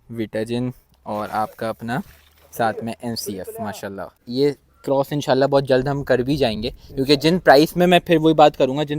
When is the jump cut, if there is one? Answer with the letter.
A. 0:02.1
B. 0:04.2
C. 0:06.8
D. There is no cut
B